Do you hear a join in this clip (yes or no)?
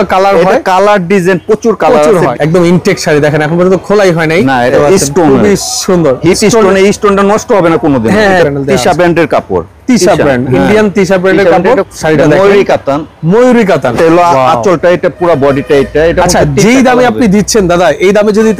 yes